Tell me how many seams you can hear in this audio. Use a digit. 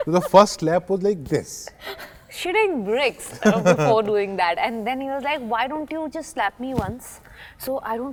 0